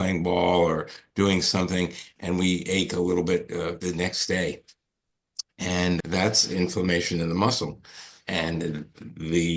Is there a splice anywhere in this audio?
yes; 2 cuts; at 3.8 s, 6.0 s

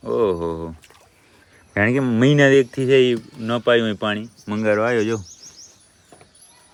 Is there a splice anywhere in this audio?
no; 0 cuts

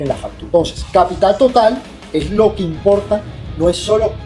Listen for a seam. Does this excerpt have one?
no; 0 cuts

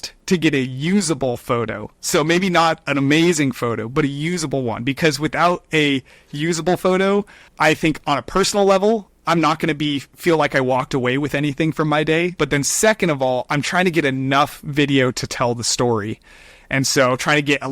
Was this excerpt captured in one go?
no; 2 cuts; at 7.5 s, 12.4 s

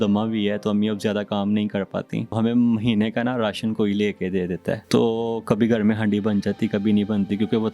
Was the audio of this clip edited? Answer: yes; 2 cuts; at 2.4 s, 4.8 s

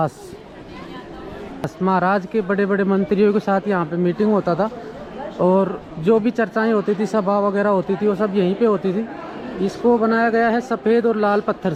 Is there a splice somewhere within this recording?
no; 0 cuts

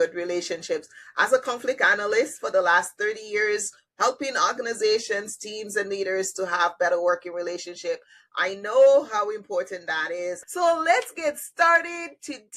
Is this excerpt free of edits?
no; 1 cut; at 10.4 s

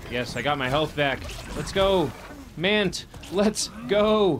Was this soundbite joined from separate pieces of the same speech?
no; 0 cuts

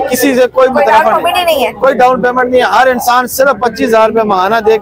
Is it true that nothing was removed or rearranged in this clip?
yes; 0 cuts

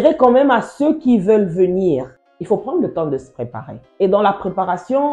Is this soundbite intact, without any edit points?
yes; 0 cuts

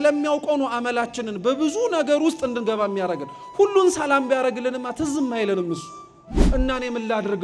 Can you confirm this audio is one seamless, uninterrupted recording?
no; 1 cut; at 6.5 s

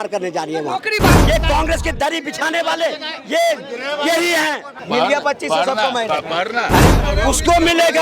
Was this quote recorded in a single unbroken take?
no; 3 cuts; at 1.2 s, 4.8 s, 6.9 s

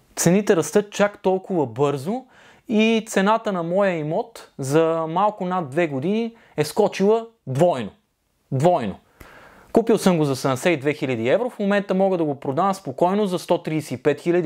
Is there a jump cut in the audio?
no; 0 cuts

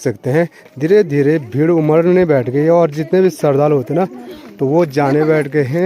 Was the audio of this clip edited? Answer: no; 0 cuts

